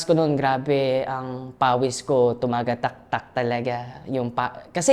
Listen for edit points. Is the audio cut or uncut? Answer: uncut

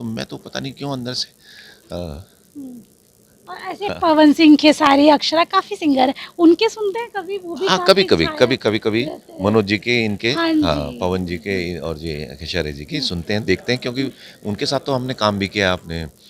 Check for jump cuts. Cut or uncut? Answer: uncut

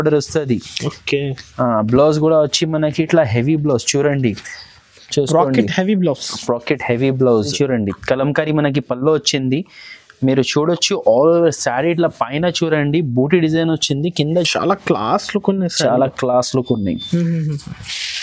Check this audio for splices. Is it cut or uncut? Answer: cut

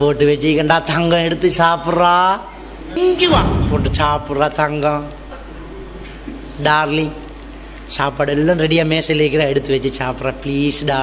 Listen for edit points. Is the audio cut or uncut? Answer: cut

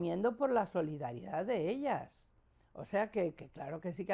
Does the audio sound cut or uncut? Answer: uncut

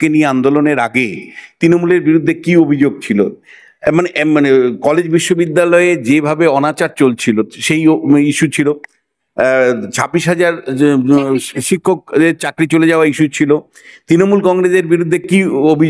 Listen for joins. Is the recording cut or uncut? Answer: uncut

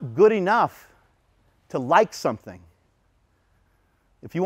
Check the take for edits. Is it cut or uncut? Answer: uncut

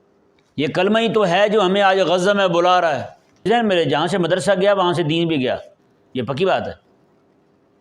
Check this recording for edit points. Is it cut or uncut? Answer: cut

